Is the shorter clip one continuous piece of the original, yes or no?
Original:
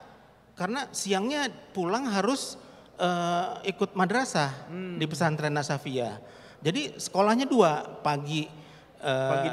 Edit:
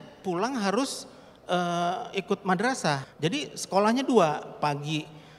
no